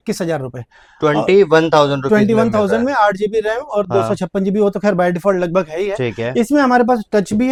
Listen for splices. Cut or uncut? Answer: uncut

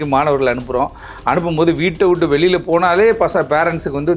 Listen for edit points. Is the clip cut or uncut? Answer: uncut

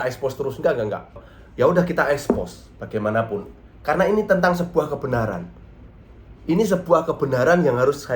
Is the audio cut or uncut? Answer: cut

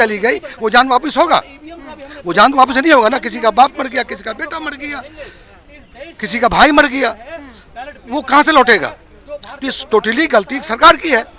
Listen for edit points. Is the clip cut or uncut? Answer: uncut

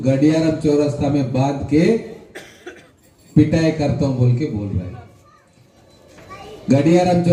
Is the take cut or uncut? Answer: uncut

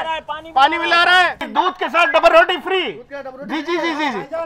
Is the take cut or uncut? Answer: cut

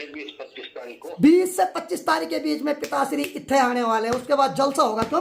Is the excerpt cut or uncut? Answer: cut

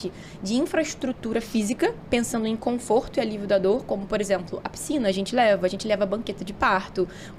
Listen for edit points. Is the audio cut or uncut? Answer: uncut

